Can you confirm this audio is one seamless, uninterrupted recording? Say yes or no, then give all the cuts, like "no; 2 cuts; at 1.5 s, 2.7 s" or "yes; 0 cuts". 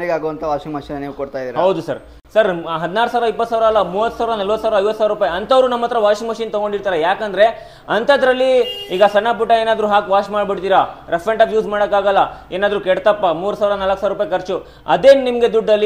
yes; 0 cuts